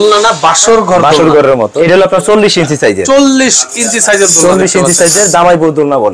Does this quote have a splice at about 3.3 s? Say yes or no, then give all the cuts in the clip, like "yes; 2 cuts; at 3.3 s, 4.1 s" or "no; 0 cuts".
no; 1 cut; at 1.8 s